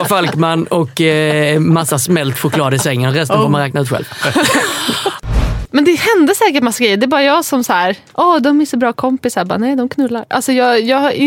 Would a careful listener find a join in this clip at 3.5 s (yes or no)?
no